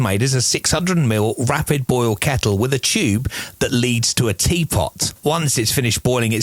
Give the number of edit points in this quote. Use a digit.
1